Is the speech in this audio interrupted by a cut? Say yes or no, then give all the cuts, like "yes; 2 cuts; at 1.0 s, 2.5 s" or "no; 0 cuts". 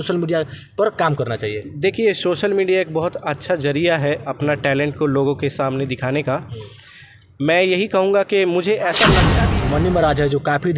yes; 1 cut; at 9.3 s